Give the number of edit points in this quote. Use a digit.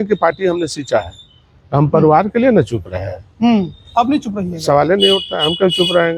0